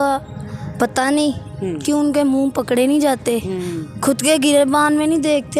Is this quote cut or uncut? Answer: uncut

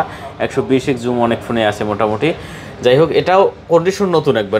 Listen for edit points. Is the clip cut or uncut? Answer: uncut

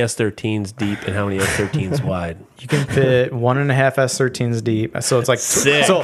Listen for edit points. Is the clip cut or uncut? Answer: uncut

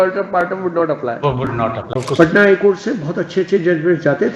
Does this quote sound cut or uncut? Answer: cut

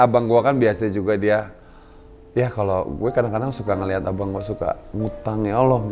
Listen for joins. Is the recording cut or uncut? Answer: uncut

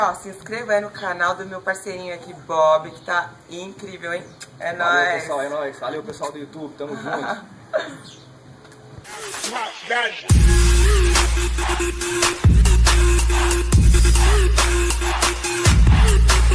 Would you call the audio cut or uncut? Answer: uncut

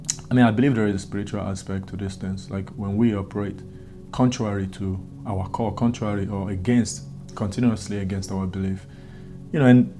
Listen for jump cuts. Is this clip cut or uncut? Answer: uncut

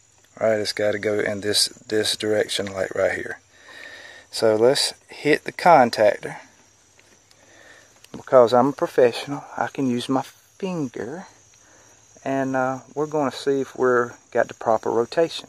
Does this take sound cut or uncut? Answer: uncut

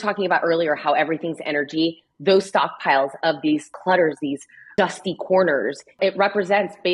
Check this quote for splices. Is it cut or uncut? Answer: cut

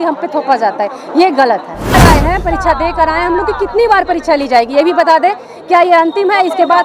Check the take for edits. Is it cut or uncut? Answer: cut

